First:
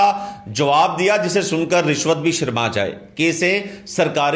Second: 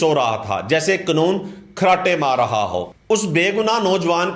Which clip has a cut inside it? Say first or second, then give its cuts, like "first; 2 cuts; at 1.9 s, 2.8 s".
second; 1 cut; at 2.8 s